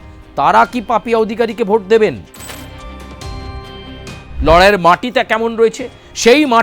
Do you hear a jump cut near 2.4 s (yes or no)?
yes